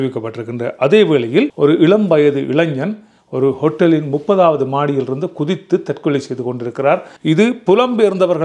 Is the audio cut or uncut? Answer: cut